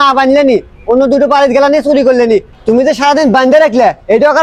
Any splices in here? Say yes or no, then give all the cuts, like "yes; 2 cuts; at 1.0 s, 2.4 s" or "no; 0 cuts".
yes; 1 cut; at 2.5 s